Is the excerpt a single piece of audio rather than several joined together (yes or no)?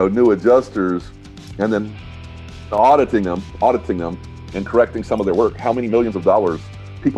yes